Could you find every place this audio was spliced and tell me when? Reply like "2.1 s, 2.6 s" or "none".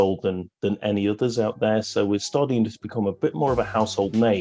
none